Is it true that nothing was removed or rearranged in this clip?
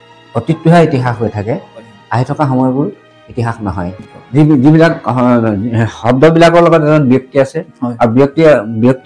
no; 1 cut; at 4.1 s

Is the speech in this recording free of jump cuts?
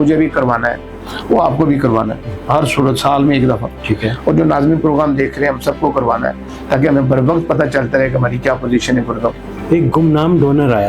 no; 1 cut; at 9.5 s

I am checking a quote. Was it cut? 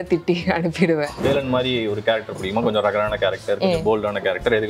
yes; 1 cut; at 1.2 s

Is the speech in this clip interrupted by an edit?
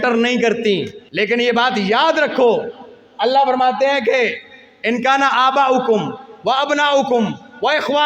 yes; 1 cut; at 1.0 s

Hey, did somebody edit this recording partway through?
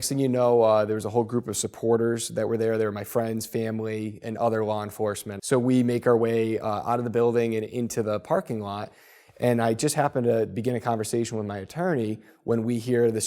yes; 1 cut; at 5.3 s

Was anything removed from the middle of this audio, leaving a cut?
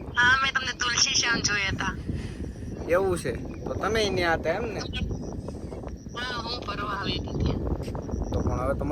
no; 0 cuts

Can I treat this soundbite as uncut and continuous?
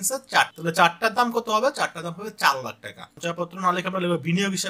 no; 1 cut; at 3.1 s

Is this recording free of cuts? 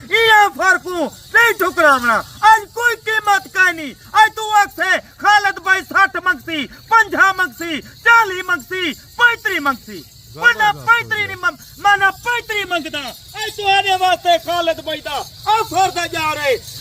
yes; 0 cuts

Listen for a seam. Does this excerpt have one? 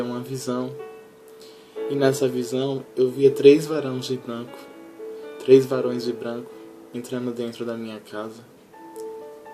no; 0 cuts

